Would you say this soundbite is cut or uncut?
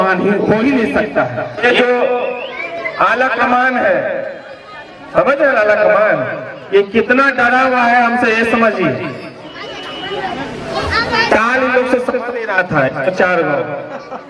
cut